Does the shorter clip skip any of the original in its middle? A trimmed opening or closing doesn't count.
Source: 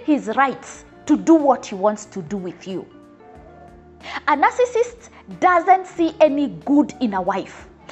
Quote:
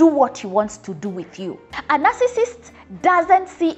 yes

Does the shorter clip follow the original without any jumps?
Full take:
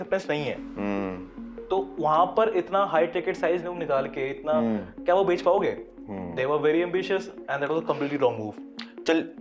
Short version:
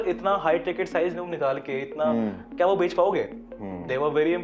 yes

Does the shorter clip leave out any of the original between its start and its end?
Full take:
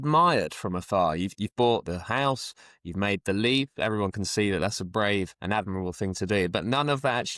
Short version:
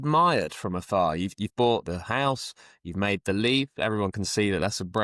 no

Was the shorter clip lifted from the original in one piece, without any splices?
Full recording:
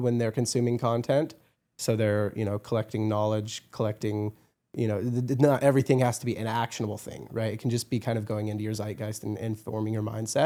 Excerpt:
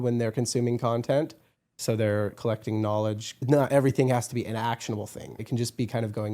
no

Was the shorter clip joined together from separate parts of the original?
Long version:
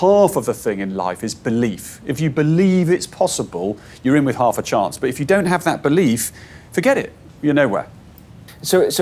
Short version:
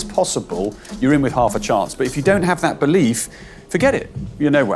no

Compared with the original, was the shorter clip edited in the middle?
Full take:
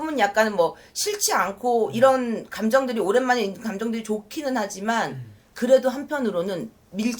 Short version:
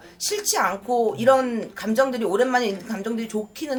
no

